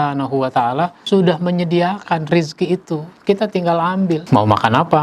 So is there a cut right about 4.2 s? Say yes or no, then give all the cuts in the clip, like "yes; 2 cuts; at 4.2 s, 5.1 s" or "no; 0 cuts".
yes; 2 cuts; at 1.0 s, 4.2 s